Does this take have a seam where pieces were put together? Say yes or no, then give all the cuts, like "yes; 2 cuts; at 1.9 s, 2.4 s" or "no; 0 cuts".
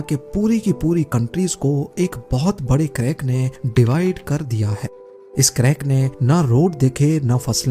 yes; 1 cut; at 4.2 s